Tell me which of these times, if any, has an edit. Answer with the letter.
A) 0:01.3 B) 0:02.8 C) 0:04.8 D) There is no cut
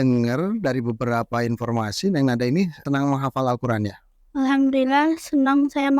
B